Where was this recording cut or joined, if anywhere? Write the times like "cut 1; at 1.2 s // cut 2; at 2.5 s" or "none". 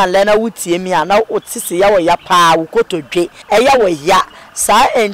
cut 1; at 3.4 s